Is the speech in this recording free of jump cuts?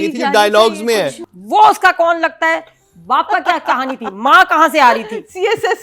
no; 1 cut; at 1.3 s

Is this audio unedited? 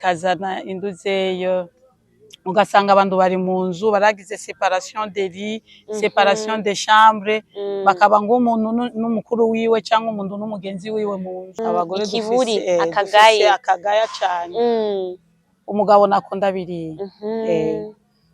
no; 1 cut; at 11.5 s

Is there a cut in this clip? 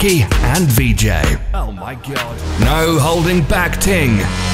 no; 0 cuts

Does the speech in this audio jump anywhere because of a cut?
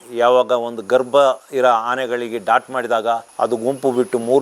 yes; 2 cuts; at 1.4 s, 3.3 s

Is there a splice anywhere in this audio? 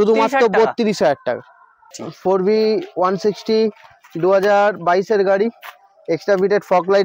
yes; 1 cut; at 1.9 s

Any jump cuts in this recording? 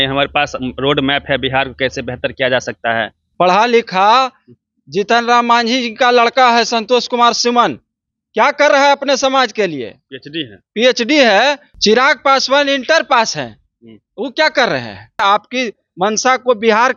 yes; 2 cuts; at 11.7 s, 15.2 s

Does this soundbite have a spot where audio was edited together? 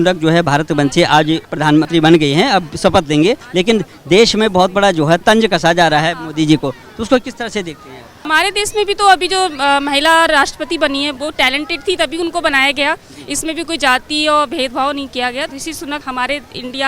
yes; 5 cuts; at 1.7 s, 3.4 s, 5.2 s, 8.2 s, 15.8 s

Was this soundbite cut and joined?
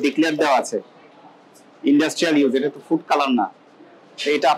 no; 0 cuts

